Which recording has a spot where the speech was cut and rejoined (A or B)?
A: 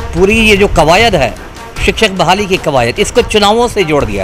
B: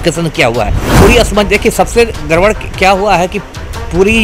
B